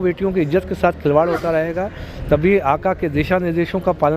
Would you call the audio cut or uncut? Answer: uncut